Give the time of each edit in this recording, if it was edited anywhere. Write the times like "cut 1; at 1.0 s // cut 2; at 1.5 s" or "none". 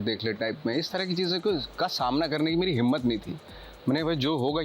none